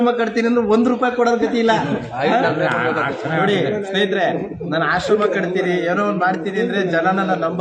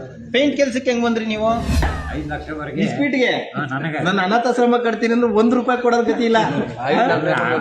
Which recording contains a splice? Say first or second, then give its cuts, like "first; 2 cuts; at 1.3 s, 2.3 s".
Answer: second; 1 cut; at 1.8 s